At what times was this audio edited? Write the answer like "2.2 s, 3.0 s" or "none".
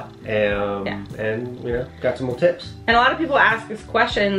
none

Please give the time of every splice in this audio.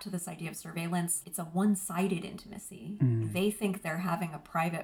1.2 s, 3.2 s

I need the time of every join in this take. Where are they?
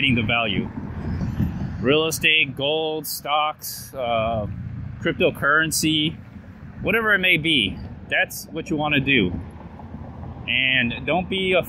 none

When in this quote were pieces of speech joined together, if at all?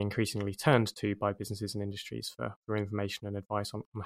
none

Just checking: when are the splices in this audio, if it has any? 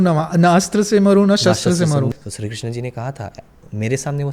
2.1 s

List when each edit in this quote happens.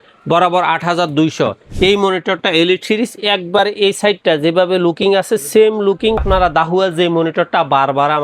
1.6 s, 6.2 s

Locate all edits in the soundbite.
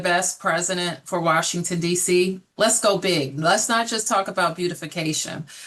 none

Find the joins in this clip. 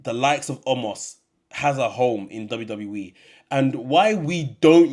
none

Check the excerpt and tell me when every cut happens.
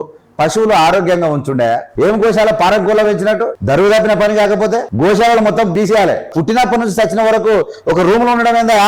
1.9 s, 3.5 s, 4.9 s, 5.8 s

